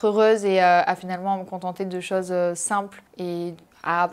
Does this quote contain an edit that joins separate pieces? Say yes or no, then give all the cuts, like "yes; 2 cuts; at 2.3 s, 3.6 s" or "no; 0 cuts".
no; 0 cuts